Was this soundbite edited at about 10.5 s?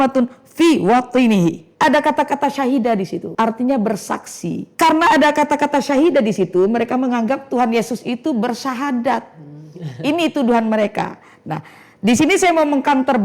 no; 3 cuts; at 1.7 s, 3.2 s, 4.7 s

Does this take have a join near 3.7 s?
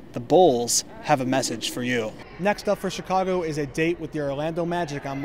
no; 1 cut; at 2.2 s

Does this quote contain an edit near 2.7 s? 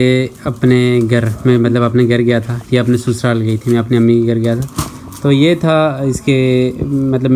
no; 0 cuts

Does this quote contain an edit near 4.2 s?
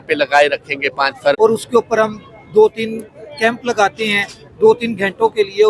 no; 1 cut; at 1.4 s

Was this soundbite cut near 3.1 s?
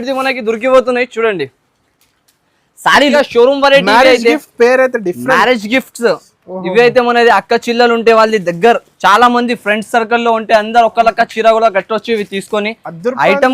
yes; 1 cut; at 3.1 s

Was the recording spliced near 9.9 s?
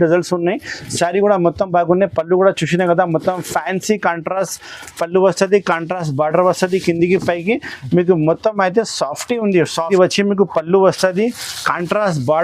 yes; 1 cut; at 9.9 s

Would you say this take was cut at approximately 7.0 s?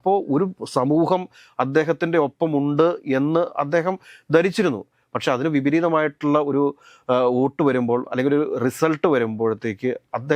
no; 0 cuts

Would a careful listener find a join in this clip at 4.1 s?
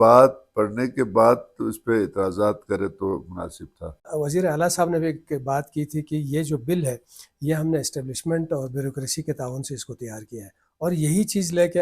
yes; 1 cut; at 4.1 s

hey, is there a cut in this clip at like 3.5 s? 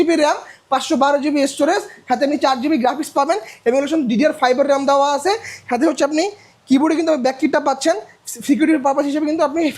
no; 0 cuts

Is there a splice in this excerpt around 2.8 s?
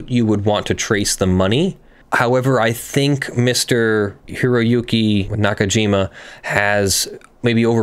no; 2 cuts; at 4.2 s, 5.3 s

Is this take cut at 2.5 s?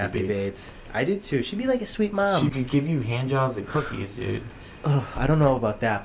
yes; 1 cut; at 2.5 s

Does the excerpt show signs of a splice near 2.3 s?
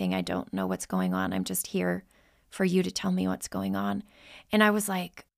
no; 0 cuts

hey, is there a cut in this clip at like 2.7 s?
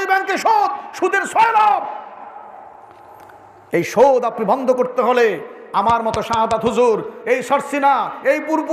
no; 0 cuts

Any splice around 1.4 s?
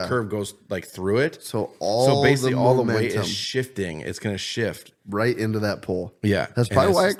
no; 0 cuts

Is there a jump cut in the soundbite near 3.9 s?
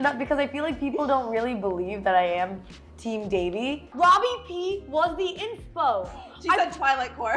yes; 1 cut; at 3.9 s

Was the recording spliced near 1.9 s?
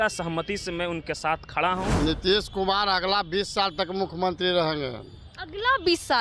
yes; 1 cut; at 1.9 s

